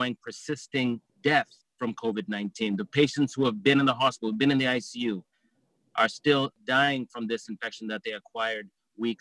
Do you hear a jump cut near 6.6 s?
yes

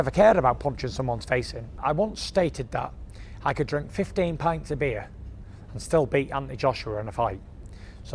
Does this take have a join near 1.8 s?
yes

